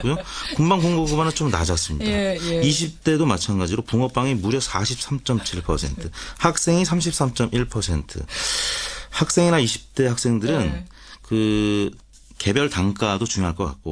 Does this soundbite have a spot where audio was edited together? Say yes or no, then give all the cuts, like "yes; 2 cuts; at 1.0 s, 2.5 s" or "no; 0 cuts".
no; 0 cuts